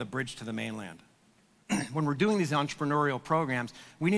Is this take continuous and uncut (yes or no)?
yes